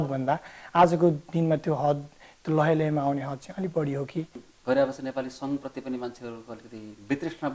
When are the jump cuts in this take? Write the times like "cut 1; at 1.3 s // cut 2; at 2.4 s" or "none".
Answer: cut 1; at 4.4 s